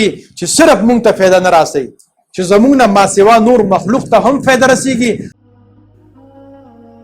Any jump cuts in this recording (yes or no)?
yes